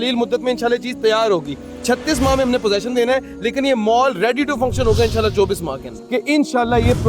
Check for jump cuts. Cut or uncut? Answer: cut